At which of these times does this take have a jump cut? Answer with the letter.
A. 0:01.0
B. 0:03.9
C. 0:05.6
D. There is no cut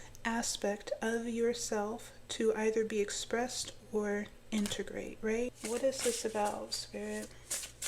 C